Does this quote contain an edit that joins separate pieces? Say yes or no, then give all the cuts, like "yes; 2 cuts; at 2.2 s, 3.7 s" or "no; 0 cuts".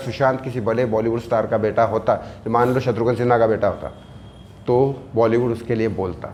no; 0 cuts